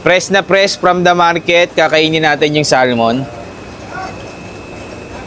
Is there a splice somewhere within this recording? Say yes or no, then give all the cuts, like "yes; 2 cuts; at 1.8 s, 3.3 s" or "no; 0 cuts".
no; 0 cuts